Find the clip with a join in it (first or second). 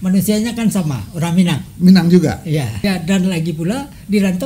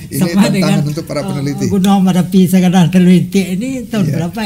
first